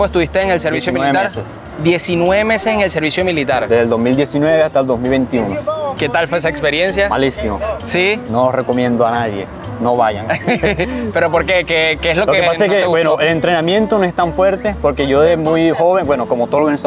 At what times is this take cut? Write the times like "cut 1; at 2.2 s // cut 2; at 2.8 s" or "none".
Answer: none